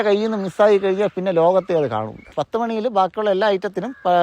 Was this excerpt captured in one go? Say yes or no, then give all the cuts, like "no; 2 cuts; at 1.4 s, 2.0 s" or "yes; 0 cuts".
no; 1 cut; at 2.4 s